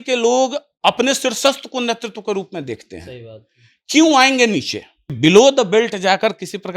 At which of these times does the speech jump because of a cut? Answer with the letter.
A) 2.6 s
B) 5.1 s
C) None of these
B